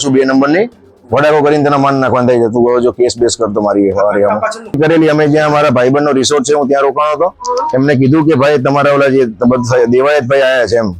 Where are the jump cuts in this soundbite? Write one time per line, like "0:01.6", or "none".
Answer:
0:04.8